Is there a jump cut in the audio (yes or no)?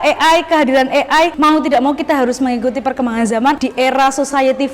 yes